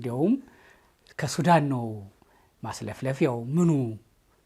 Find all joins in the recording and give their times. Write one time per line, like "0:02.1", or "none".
none